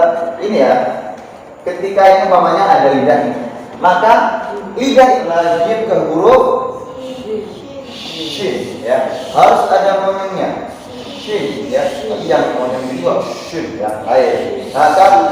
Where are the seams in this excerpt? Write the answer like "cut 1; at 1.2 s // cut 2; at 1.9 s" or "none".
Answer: cut 1; at 5.3 s